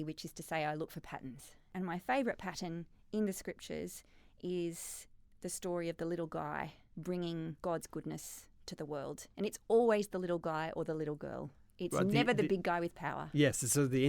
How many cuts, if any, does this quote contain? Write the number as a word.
three